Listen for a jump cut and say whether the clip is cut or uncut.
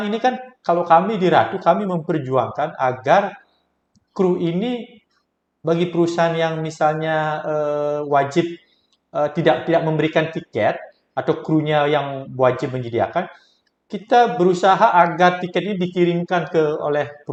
uncut